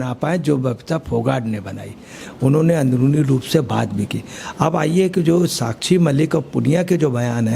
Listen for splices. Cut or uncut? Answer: cut